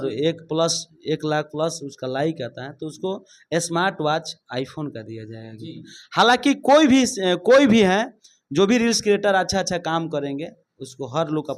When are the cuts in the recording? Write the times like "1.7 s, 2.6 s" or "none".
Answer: none